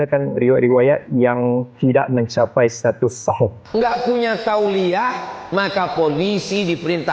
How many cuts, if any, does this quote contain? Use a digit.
1